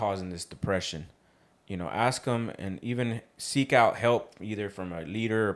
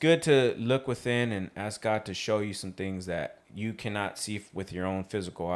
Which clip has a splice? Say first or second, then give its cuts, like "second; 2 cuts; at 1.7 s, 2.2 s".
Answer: second; 1 cut; at 3.4 s